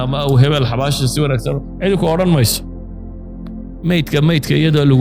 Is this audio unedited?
no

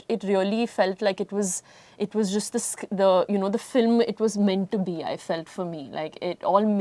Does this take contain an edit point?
no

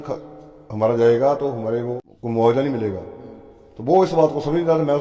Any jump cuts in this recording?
yes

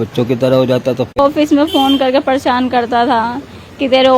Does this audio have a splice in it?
yes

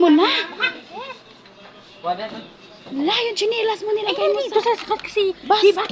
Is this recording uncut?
yes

